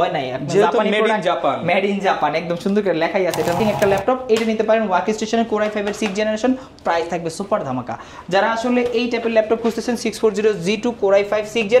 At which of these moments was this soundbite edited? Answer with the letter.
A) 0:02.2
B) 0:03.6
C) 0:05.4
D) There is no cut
B